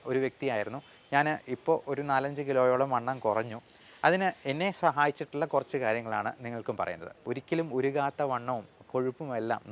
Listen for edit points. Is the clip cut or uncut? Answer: cut